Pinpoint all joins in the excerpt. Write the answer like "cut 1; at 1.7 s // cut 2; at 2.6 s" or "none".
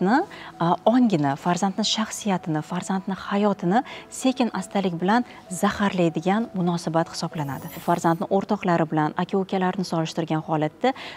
cut 1; at 7.7 s